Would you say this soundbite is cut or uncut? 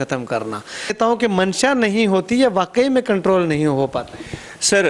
cut